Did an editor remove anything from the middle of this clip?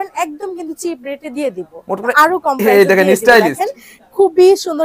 yes; 1 cut; at 2.1 s

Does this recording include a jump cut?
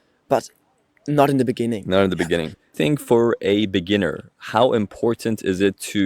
yes; 1 cut; at 2.7 s

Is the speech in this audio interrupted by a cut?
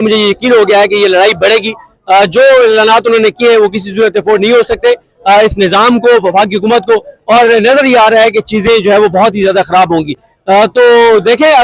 no; 0 cuts

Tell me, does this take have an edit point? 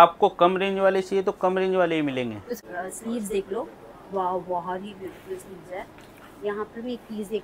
yes; 1 cut; at 2.7 s

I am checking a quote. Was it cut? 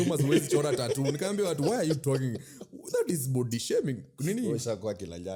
no; 0 cuts

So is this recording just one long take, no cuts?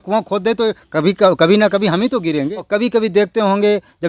no; 1 cut; at 2.6 s

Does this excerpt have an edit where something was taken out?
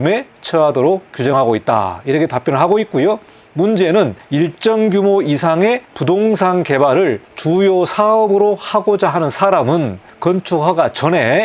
no; 0 cuts

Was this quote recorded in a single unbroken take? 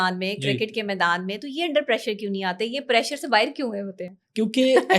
yes; 0 cuts

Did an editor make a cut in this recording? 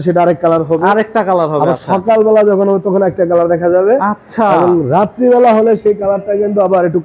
no; 0 cuts

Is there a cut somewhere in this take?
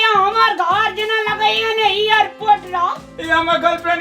yes; 1 cut; at 3.1 s

